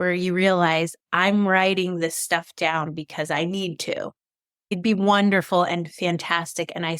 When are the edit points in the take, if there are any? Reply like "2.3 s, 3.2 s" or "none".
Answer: 4.7 s